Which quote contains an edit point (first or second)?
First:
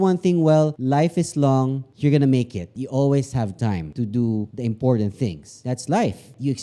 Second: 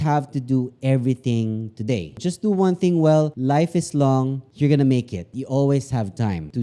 first